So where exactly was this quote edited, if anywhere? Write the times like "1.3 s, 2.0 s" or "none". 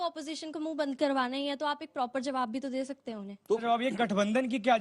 3.6 s